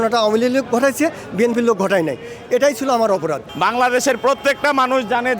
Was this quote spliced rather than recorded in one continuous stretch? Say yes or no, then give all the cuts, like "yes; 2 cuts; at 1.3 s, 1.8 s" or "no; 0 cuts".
yes; 1 cut; at 3.4 s